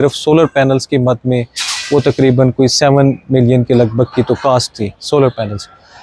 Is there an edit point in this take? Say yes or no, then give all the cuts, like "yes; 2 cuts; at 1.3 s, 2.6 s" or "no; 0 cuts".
no; 0 cuts